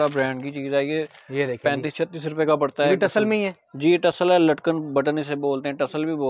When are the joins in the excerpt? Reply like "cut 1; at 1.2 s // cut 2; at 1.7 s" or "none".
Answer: none